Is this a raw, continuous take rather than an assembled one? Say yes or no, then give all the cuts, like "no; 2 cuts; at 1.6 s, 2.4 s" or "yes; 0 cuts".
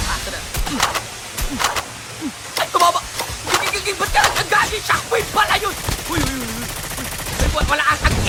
yes; 0 cuts